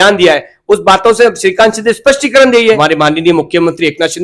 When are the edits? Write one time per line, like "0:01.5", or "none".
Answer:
0:02.8